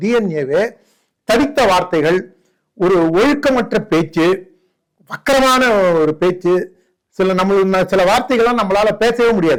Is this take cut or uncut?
uncut